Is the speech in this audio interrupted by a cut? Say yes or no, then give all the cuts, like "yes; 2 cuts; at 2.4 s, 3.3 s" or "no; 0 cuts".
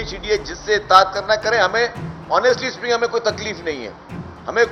no; 0 cuts